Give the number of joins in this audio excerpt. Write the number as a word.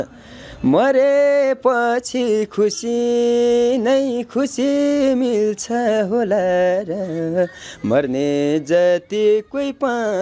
zero